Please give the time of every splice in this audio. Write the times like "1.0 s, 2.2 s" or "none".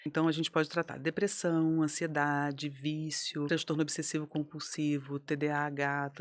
3.5 s